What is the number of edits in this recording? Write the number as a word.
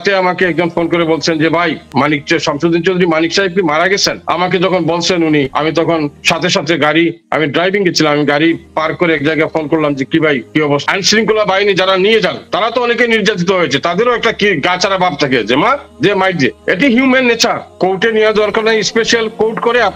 six